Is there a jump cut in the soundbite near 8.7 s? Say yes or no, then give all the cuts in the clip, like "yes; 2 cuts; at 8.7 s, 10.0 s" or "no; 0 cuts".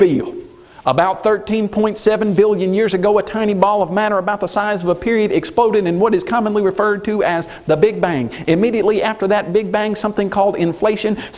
yes; 1 cut; at 8.7 s